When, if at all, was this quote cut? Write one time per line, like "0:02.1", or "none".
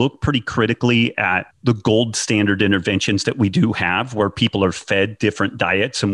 0:01.5